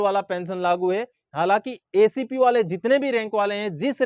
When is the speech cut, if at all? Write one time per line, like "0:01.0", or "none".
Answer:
none